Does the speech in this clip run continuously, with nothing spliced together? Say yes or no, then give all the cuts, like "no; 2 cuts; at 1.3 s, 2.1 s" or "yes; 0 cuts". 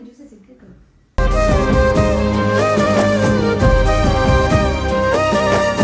yes; 0 cuts